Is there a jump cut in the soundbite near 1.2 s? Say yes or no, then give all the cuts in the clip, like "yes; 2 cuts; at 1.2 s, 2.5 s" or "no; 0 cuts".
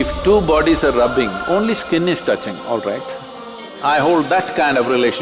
no; 1 cut; at 3.7 s